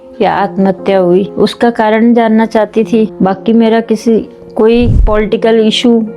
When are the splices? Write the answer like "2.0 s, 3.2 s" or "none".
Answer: 1.3 s, 3.1 s, 5.0 s